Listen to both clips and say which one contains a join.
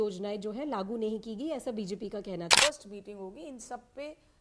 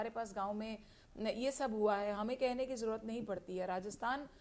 first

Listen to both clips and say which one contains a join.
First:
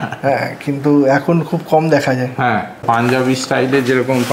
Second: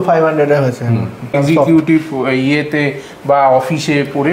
first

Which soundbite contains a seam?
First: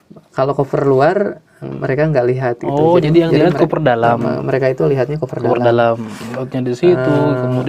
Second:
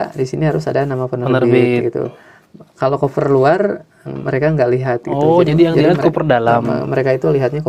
first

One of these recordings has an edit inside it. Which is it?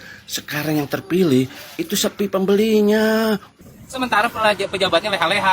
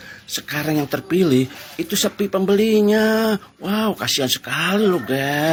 first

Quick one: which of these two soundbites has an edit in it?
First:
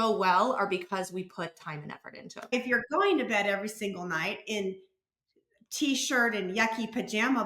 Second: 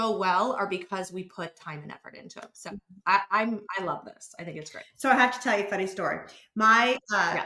first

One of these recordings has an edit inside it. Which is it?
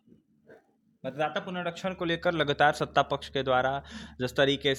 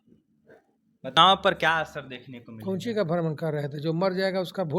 second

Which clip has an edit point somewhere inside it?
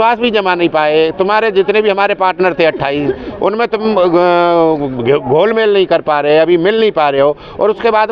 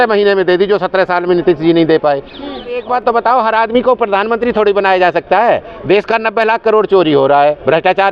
second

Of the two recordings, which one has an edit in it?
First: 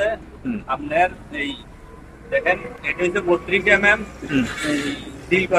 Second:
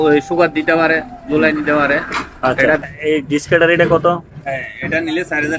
second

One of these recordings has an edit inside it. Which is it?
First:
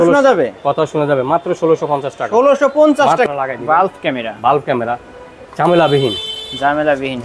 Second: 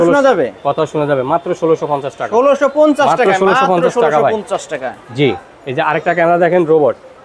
first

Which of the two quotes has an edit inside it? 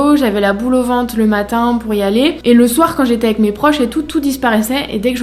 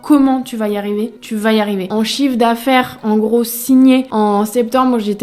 second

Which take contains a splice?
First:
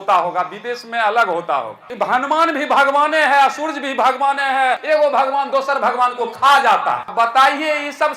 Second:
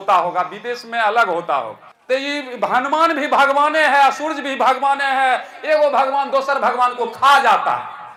first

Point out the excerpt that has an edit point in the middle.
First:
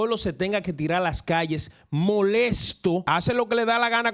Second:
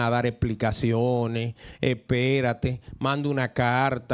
first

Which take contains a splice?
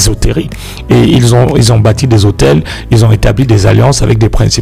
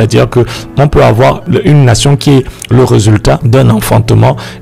second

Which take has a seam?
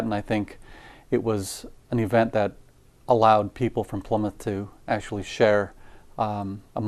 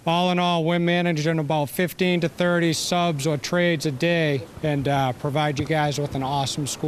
second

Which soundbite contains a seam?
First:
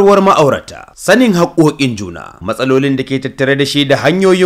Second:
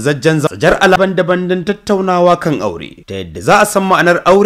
second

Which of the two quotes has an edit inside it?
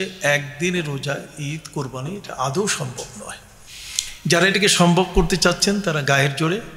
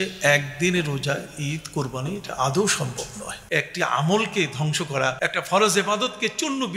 second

